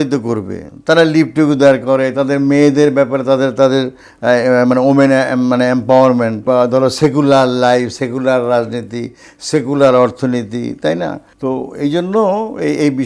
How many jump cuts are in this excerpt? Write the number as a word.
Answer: two